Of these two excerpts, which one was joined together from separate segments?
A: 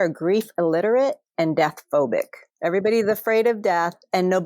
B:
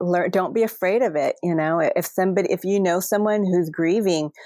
A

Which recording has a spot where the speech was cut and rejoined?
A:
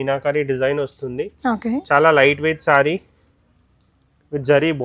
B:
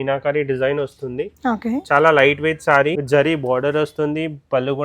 B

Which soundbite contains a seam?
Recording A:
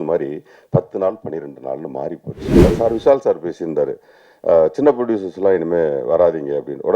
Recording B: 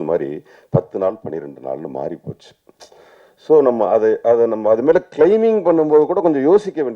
A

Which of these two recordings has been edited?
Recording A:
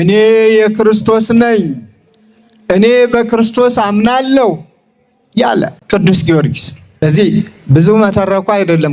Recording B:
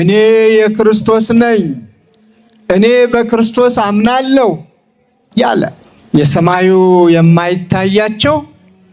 B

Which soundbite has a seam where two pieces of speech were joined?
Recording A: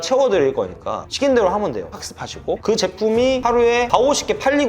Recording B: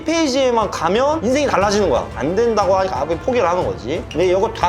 A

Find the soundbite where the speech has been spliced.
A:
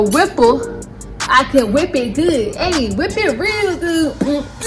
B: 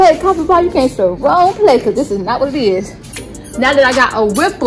B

